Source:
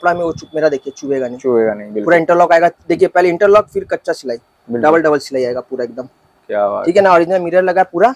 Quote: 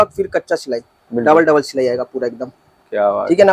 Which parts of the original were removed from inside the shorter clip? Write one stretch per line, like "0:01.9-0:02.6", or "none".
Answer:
none